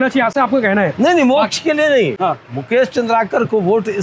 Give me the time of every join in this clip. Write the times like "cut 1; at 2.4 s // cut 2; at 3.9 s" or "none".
none